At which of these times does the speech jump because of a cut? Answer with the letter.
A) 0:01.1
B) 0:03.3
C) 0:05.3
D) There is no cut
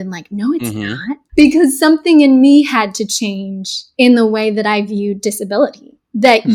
A